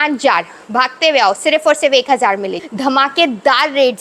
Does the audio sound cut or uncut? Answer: cut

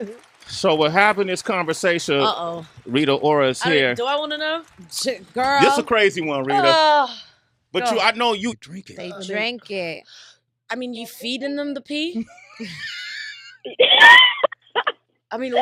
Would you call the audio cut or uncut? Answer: uncut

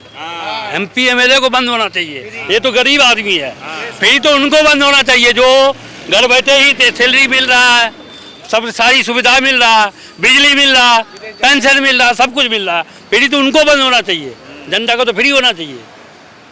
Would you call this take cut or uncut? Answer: uncut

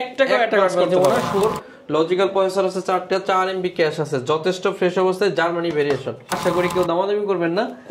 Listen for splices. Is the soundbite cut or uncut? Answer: cut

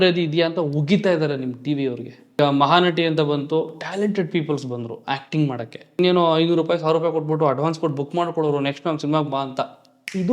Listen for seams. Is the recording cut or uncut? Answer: cut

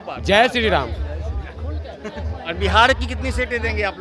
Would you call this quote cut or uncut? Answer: uncut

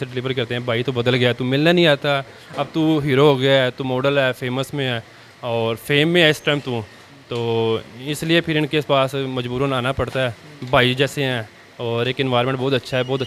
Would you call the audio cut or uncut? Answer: uncut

